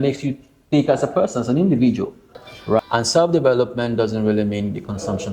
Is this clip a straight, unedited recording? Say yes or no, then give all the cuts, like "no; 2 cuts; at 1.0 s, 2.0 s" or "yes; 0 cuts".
no; 1 cut; at 2.8 s